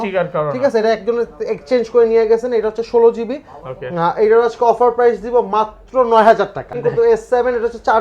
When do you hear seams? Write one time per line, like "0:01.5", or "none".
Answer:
0:06.7